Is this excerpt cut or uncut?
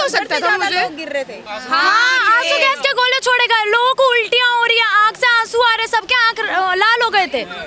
cut